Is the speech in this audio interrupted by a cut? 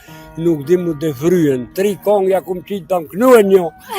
yes; 1 cut; at 1.7 s

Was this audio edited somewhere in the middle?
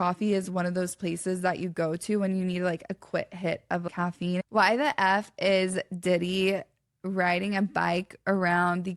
yes; 1 cut; at 4.4 s

